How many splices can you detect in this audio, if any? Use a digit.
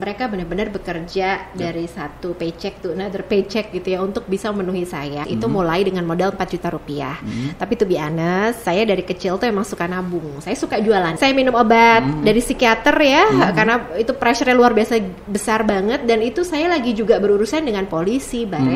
2